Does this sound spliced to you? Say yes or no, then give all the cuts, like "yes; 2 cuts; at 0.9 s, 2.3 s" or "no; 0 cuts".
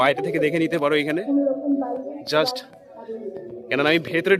no; 0 cuts